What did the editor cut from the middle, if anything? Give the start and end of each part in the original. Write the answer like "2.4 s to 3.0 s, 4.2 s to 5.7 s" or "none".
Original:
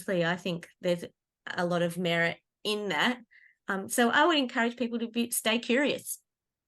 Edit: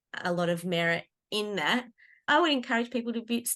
3.6 s to 4.1 s